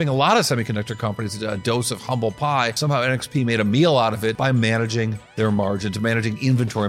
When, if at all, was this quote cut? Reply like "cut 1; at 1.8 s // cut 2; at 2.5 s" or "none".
cut 1; at 2.8 s // cut 2; at 4.4 s